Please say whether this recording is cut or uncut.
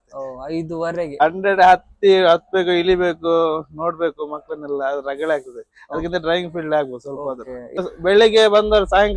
cut